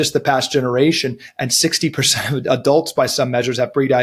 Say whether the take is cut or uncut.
uncut